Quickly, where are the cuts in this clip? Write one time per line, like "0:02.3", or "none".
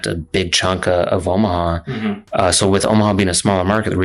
none